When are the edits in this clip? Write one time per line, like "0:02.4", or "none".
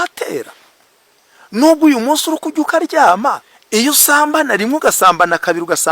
0:03.5